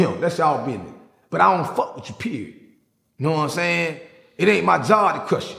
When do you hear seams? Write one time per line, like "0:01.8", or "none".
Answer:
none